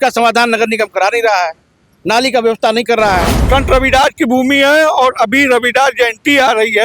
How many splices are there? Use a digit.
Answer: 1